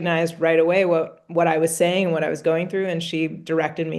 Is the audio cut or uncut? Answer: uncut